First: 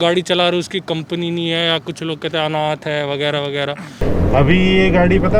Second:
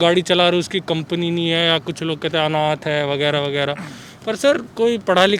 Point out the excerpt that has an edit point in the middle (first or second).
first